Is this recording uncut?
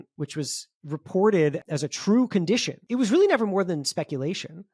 no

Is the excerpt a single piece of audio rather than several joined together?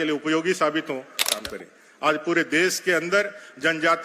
no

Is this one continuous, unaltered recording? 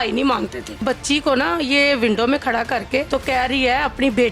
no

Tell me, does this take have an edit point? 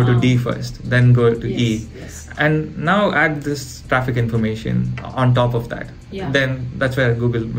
no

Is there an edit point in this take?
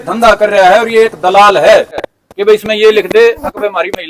yes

